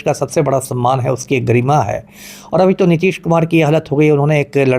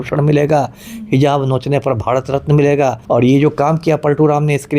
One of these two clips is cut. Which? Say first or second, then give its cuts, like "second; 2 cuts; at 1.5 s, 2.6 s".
second; 1 cut; at 3.0 s